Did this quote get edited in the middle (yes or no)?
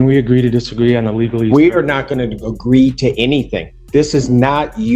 no